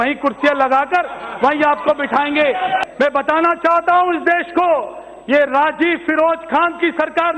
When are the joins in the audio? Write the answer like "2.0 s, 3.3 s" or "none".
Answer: 2.8 s

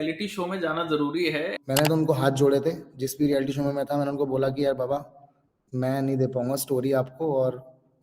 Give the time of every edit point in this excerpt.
1.5 s

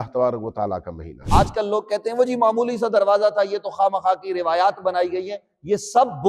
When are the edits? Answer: 1.2 s

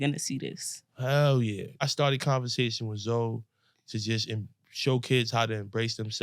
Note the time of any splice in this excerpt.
1.8 s

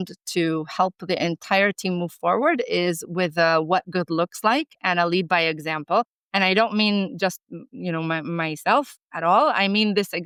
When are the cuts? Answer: none

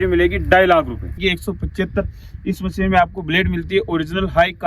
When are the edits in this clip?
1.1 s

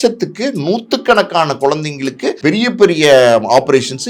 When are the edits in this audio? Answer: 2.4 s

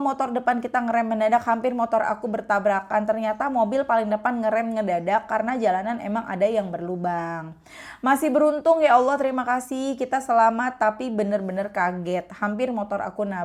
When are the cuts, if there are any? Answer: none

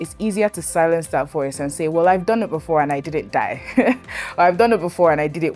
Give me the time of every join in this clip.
none

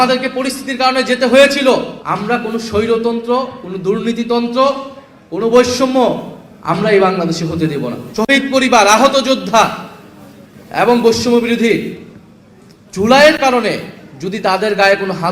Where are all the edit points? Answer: 2.0 s, 8.0 s

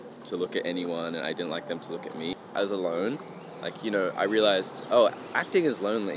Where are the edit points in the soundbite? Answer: 2.4 s

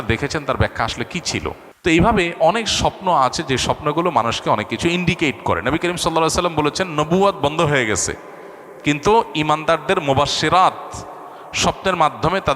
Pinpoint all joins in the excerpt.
1.7 s

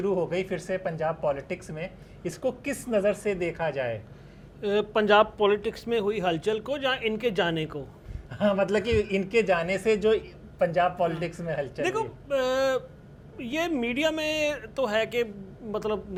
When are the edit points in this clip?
none

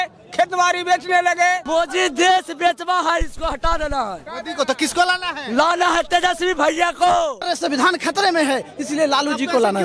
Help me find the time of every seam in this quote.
1.6 s, 7.5 s

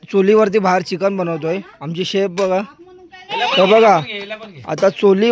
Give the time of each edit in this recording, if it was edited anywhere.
3.2 s

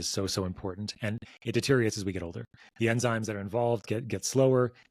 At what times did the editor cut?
none

